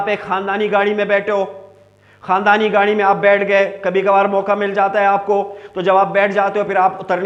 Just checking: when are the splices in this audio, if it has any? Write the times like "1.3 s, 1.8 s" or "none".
none